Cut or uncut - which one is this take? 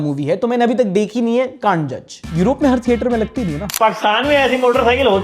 cut